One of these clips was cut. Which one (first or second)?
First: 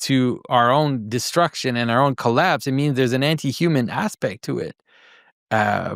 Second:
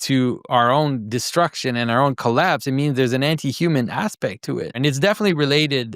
second